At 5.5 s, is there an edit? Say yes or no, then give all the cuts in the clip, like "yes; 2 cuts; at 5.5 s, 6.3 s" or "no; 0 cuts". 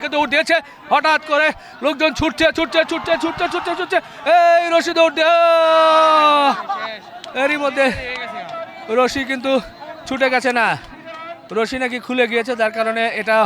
no; 0 cuts